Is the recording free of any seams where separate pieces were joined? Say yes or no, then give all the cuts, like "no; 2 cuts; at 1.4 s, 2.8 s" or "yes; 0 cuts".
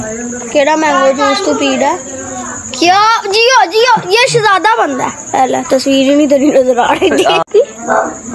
no; 1 cut; at 7.4 s